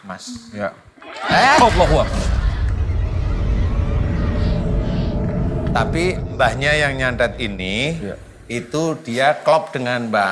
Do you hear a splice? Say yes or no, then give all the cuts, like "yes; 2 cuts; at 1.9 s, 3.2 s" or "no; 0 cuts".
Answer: yes; 1 cut; at 5.7 s